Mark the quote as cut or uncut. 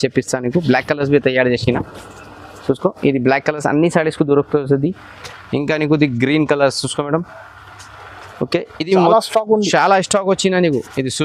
uncut